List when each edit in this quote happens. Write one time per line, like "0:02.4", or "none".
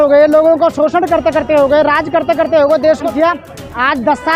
0:03.0